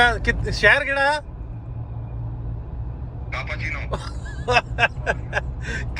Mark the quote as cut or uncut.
uncut